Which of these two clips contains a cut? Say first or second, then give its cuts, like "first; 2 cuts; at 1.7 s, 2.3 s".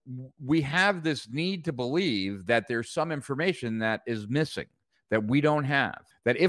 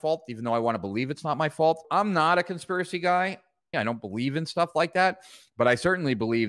second; 2 cuts; at 1.8 s, 3.7 s